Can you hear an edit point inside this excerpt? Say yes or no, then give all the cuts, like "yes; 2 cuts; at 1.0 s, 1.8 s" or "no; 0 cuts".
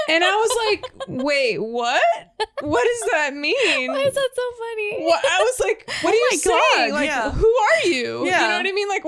yes; 1 cut; at 5.9 s